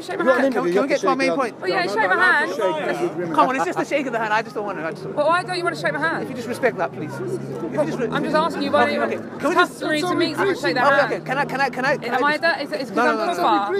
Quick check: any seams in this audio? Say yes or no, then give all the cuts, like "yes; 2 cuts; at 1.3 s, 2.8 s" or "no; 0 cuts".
no; 0 cuts